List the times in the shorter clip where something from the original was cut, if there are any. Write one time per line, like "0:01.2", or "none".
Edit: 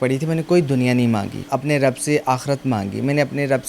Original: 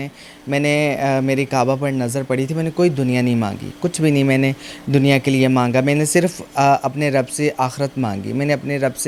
0:01.5